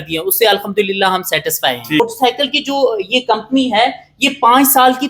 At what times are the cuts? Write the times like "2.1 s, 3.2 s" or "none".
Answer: 2.0 s